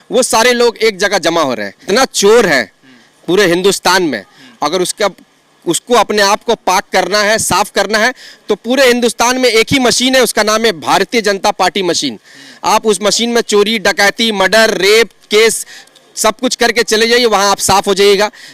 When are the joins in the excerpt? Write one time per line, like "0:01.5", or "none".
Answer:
0:01.9